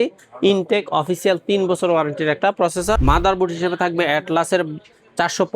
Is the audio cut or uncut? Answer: cut